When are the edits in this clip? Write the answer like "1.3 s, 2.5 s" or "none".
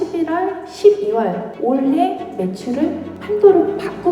1.5 s, 3.1 s